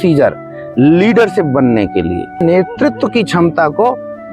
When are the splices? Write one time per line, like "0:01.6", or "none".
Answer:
0:02.4